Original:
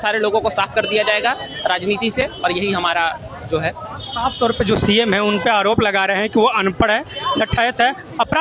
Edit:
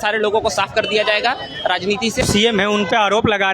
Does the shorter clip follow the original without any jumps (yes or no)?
no